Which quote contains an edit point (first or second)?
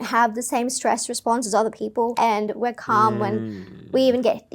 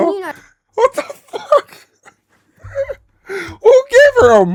first